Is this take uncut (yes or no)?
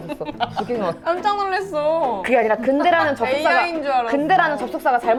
yes